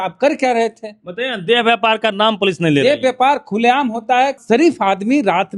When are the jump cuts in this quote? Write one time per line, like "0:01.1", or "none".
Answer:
0:04.4